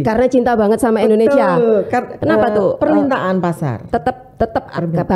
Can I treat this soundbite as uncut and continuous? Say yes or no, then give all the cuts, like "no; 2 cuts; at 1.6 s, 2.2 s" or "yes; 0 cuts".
no; 1 cut; at 2.1 s